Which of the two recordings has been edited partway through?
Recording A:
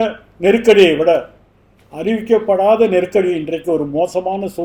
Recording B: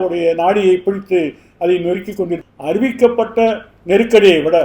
B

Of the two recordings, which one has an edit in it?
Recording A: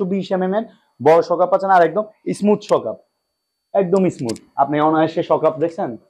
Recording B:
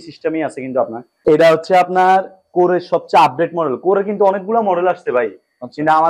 B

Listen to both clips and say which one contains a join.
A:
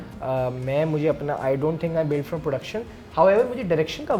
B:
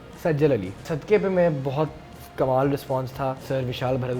B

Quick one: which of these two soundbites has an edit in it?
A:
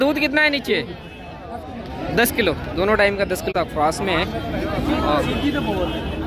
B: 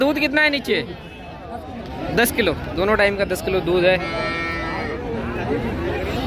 A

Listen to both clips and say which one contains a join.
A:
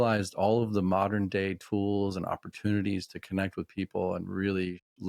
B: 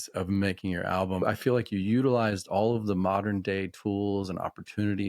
B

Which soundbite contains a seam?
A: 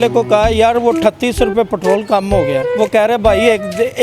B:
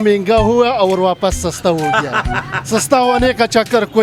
A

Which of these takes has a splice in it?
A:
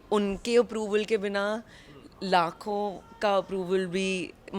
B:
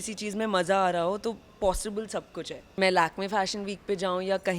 B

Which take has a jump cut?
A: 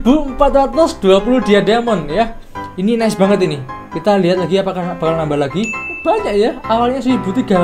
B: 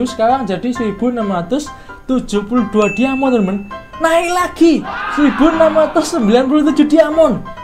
A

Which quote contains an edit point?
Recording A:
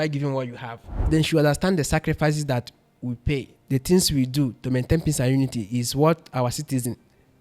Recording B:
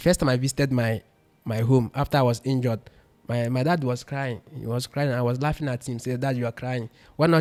A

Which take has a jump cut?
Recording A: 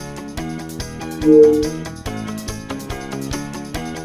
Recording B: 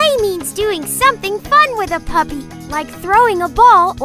A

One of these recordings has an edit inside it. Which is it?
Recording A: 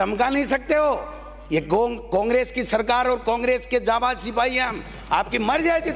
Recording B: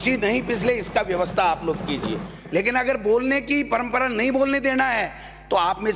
B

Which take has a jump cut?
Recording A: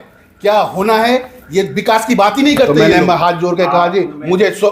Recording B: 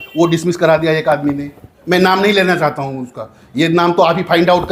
A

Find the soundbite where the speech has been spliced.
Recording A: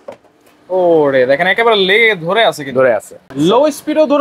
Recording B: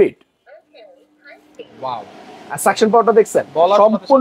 A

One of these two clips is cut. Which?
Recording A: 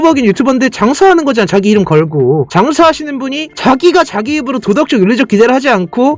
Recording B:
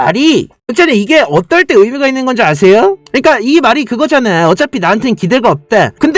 B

